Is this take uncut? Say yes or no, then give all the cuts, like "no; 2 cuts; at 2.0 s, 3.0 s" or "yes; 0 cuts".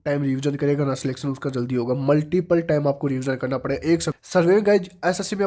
no; 1 cut; at 4.2 s